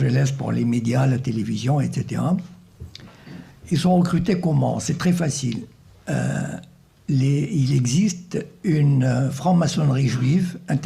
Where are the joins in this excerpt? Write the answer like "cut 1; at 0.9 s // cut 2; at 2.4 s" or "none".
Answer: cut 1; at 1.0 s